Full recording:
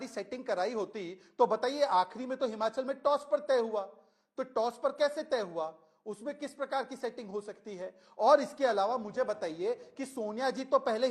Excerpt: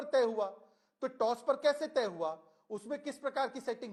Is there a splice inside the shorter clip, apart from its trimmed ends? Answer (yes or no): no